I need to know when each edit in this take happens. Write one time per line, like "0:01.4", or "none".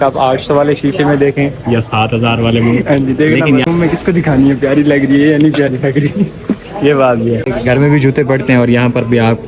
0:03.6
0:07.5